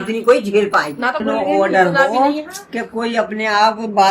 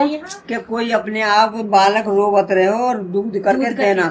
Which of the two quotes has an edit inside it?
first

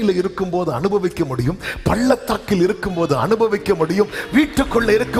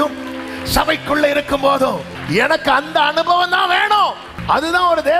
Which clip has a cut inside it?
second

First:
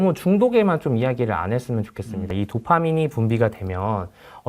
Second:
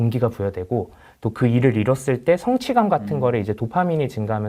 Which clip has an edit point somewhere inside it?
first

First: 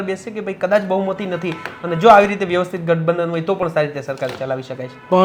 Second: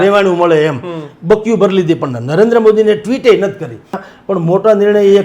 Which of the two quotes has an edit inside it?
second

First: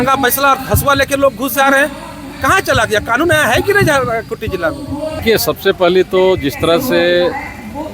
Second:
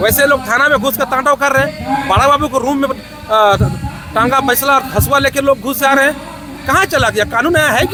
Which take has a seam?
first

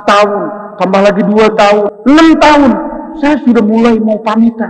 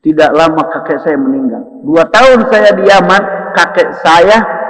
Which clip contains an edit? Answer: first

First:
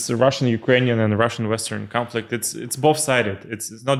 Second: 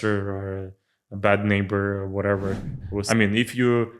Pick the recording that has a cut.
second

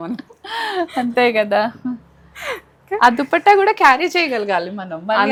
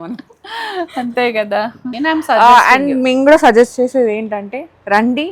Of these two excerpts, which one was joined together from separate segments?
second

